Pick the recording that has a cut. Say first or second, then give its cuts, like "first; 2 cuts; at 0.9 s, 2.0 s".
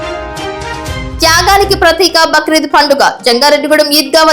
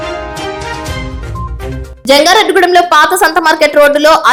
first; 1 cut; at 1.1 s